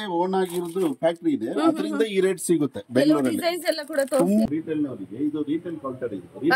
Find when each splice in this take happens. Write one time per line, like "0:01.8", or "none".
0:04.5